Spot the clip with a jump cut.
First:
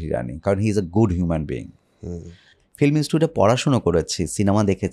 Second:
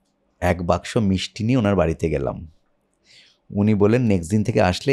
first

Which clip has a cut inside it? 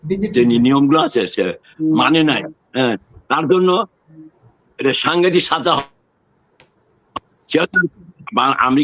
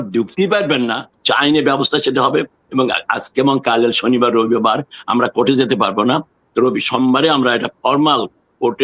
second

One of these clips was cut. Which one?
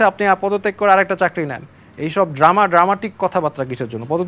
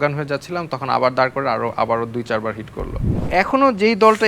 second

